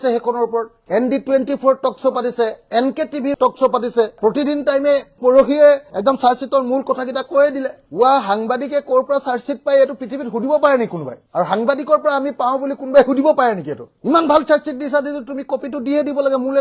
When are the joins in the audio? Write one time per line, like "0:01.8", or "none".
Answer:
none